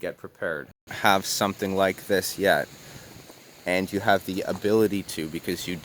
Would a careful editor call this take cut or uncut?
cut